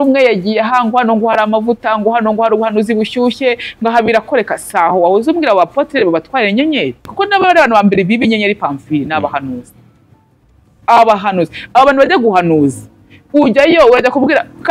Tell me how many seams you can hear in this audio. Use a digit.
1